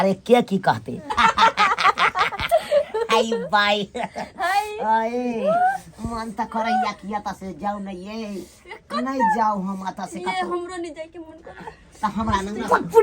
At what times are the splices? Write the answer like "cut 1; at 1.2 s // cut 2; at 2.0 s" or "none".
cut 1; at 1.2 s

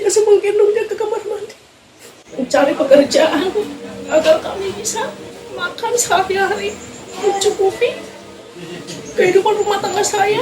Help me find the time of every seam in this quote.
cut 1; at 2.2 s

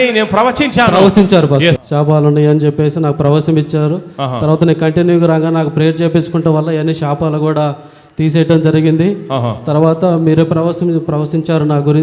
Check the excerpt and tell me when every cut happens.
cut 1; at 1.8 s

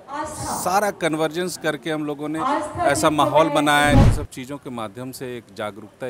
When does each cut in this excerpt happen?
cut 1; at 4.0 s

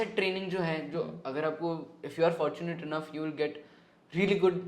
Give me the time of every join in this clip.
none

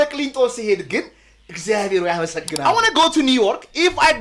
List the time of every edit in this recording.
cut 1; at 2.5 s

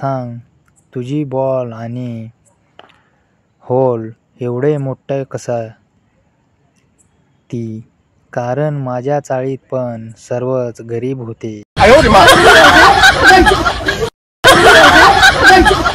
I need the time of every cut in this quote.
cut 1; at 11.6 s

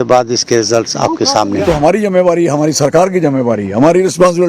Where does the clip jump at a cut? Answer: cut 1; at 1.6 s

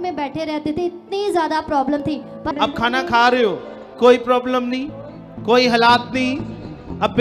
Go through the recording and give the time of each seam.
cut 1; at 2.3 s

